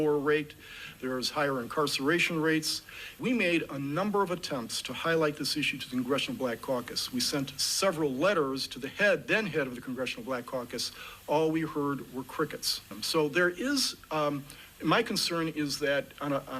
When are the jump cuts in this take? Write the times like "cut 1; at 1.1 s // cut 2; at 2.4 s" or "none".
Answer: cut 1; at 3.1 s